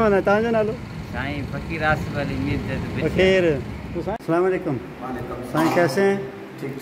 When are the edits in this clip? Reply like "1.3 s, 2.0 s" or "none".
4.1 s